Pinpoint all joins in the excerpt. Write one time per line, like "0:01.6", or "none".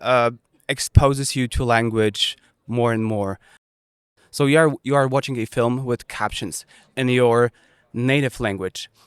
0:04.0